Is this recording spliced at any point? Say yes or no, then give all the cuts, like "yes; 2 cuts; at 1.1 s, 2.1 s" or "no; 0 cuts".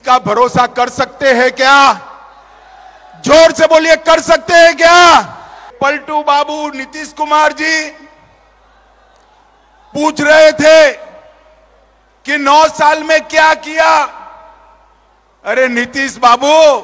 yes; 1 cut; at 5.7 s